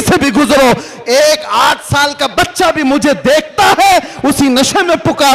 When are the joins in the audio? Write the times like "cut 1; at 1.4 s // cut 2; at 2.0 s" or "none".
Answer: none